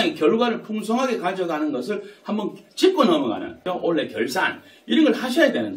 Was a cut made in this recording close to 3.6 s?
yes; 1 cut; at 3.6 s

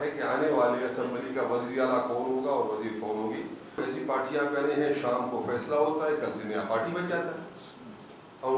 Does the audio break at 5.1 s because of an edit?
no; 1 cut; at 3.8 s

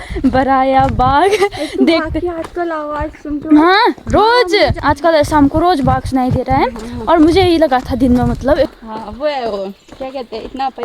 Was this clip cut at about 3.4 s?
no; 2 cuts; at 4.8 s, 8.7 s

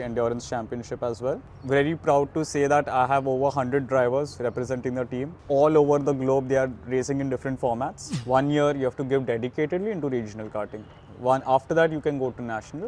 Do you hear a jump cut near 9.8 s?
no; 3 cuts; at 1.5 s, 5.4 s, 8.1 s

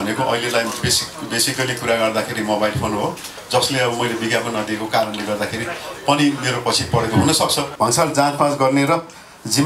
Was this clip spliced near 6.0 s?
no; 2 cuts; at 3.3 s, 7.6 s

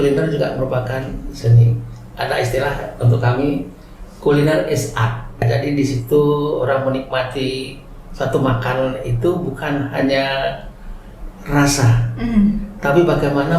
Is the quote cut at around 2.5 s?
no; 1 cut; at 5.4 s

